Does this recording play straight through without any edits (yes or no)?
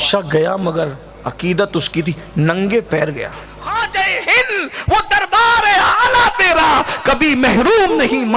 no